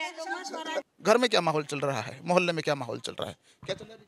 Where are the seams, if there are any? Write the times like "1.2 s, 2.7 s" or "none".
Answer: none